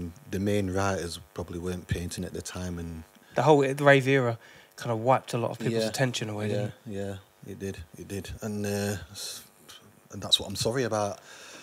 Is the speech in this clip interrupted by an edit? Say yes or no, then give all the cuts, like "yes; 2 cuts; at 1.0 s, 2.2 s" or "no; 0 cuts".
yes; 1 cut; at 3.2 s